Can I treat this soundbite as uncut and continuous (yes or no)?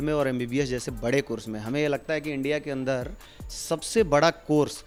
yes